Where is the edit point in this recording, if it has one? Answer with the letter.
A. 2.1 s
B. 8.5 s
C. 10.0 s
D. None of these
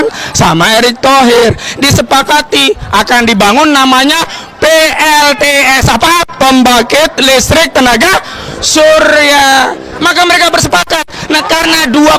C